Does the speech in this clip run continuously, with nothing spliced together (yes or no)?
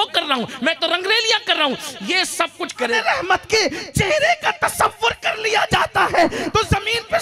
no